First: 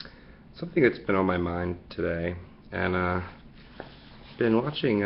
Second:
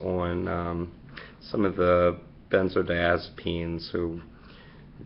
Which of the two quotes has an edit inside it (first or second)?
second